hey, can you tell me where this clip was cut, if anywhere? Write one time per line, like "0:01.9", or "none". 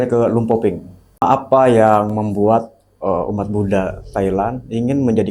0:01.2